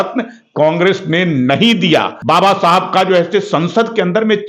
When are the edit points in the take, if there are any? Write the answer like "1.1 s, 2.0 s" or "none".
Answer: 2.1 s

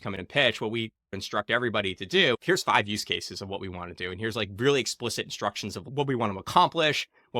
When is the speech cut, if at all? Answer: 1.2 s, 2.3 s, 5.9 s

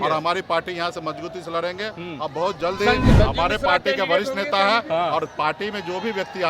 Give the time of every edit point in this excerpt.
3.1 s

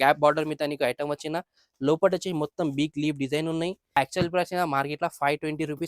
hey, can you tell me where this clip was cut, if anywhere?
3.9 s

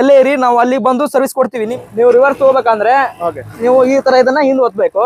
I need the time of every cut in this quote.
1.6 s

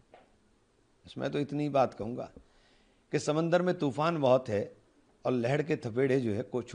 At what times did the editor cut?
none

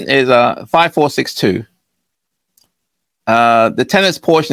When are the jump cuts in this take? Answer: none

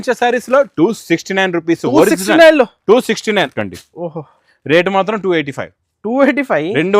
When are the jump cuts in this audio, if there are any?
3.5 s

